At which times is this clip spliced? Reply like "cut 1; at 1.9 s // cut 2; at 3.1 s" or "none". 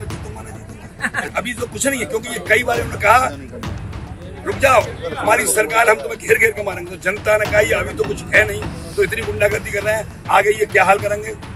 cut 1; at 1.3 s

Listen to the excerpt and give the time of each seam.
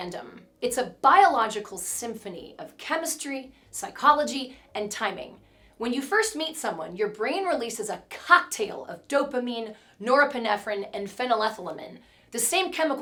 none

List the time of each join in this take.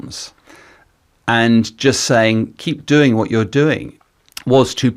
cut 1; at 3.9 s

